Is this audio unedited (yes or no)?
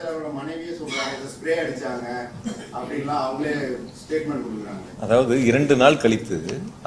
yes